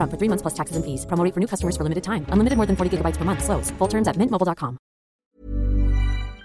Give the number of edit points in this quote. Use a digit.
1